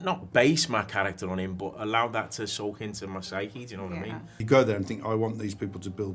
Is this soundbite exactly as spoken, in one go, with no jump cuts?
no; 1 cut; at 4.4 s

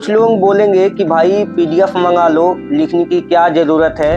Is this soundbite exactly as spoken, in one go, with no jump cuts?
yes; 0 cuts

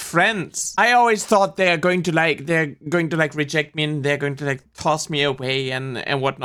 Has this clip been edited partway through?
no; 0 cuts

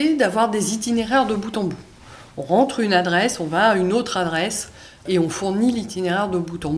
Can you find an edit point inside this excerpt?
yes; 1 cut; at 5.0 s

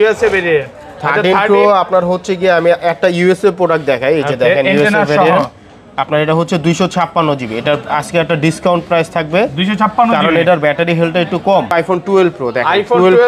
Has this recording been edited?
yes; 1 cut; at 11.7 s

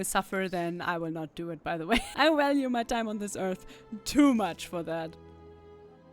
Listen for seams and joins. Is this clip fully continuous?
no; 1 cut; at 2.1 s

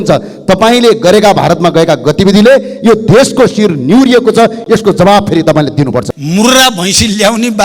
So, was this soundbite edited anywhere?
yes; 1 cut; at 6.2 s

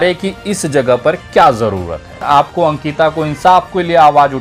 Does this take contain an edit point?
yes; 1 cut; at 2.2 s

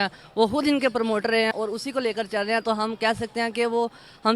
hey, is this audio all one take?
no; 1 cut; at 1.5 s

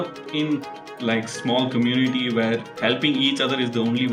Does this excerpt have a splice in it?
no; 0 cuts

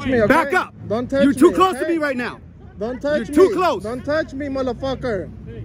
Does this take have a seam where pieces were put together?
no; 0 cuts

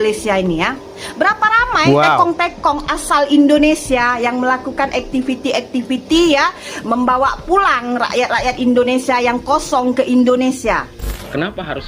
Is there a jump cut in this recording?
yes; 1 cut; at 11.0 s

